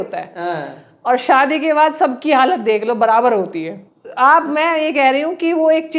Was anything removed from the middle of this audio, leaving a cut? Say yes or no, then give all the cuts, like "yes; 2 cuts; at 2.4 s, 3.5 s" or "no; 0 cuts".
no; 0 cuts